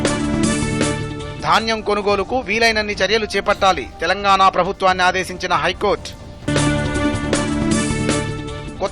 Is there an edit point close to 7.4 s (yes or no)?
no